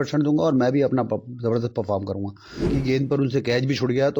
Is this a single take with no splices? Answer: no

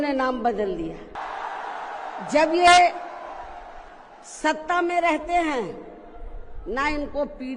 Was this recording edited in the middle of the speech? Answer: yes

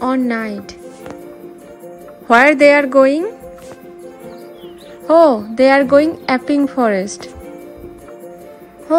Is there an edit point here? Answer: yes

